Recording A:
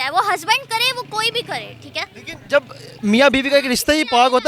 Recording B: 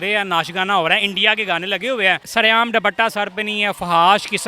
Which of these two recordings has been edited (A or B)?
B